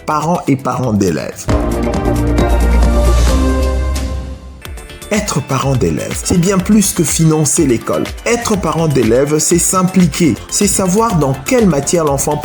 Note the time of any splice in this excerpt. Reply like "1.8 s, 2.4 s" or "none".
1.3 s, 4.4 s, 10.4 s

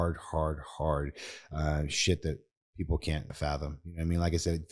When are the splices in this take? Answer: 3.3 s

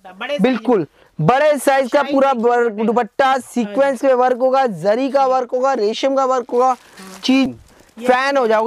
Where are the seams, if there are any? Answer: 7.5 s

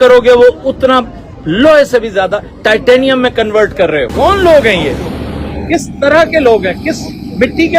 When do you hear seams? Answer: 4.1 s

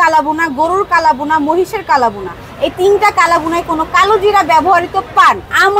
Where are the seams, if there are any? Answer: none

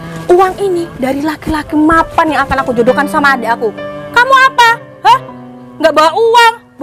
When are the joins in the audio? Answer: none

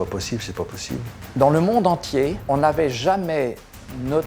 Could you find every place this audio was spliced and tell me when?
1.1 s, 2.4 s

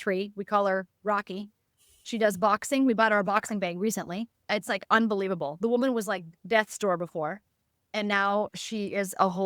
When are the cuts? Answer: 4.3 s, 6.4 s

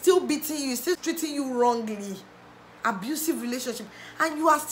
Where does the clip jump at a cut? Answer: 1.0 s

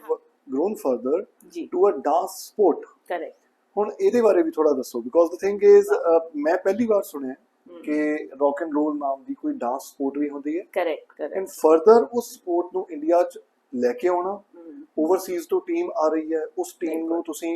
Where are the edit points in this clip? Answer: none

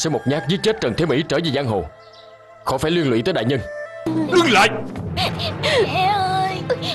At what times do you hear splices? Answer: 4.1 s

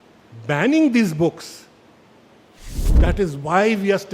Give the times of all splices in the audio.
2.8 s

